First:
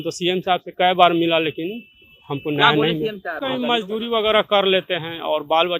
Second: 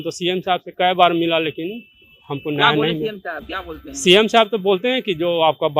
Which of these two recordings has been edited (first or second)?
first